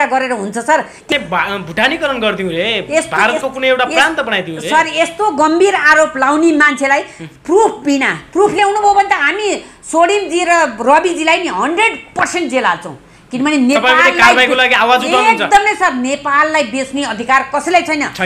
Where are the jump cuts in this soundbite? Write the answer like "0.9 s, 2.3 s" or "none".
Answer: 1.1 s